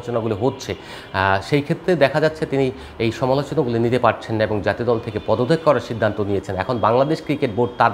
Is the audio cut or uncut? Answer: uncut